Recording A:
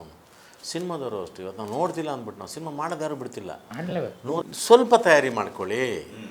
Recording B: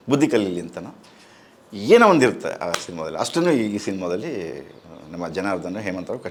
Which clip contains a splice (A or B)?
A